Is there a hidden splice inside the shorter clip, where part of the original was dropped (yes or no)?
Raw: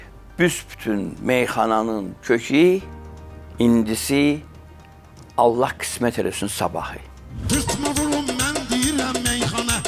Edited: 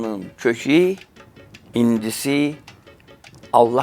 no